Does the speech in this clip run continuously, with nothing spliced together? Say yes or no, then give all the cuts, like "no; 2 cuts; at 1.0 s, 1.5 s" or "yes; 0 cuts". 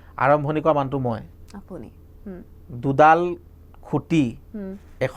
yes; 0 cuts